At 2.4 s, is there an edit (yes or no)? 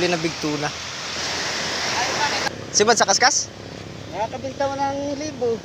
yes